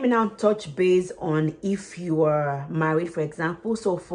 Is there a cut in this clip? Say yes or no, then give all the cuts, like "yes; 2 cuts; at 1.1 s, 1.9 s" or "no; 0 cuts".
no; 0 cuts